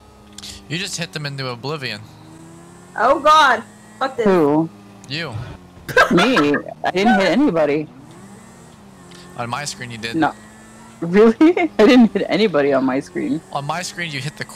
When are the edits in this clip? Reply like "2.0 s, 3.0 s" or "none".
none